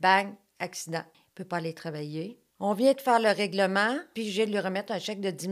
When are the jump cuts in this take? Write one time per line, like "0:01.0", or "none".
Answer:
0:01.2
0:02.4
0:04.1